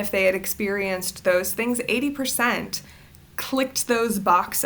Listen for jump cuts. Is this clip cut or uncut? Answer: uncut